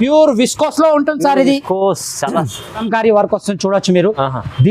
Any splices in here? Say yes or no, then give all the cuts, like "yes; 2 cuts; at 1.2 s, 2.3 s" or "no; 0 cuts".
yes; 1 cut; at 2.8 s